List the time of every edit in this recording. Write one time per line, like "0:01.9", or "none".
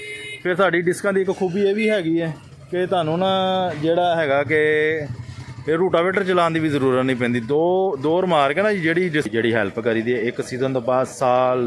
0:09.3